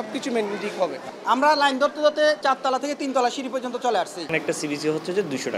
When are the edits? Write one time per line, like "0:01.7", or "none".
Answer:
0:01.0
0:02.4
0:04.2